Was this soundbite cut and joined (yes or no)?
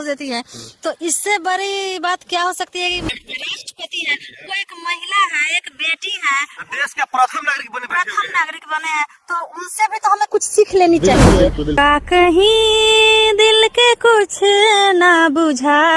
yes